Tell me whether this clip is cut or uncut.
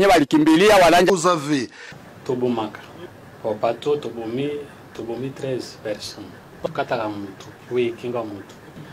cut